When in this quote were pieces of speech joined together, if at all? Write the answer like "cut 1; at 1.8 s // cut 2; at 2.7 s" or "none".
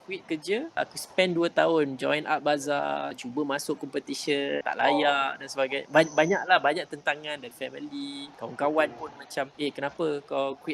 cut 1; at 0.7 s // cut 2; at 3.2 s // cut 3; at 4.6 s // cut 4; at 7.5 s // cut 5; at 8.3 s // cut 6; at 9.5 s